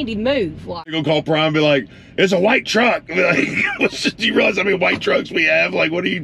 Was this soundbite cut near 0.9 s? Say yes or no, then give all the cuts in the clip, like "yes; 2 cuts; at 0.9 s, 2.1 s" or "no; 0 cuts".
yes; 1 cut; at 0.9 s